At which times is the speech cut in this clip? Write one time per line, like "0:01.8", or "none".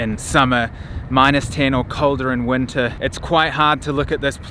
none